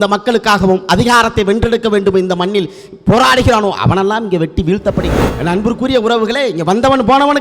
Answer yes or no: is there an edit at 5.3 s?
yes